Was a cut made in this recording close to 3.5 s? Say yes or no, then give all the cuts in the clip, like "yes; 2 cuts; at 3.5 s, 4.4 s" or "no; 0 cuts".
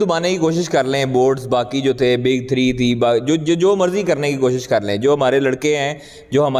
no; 0 cuts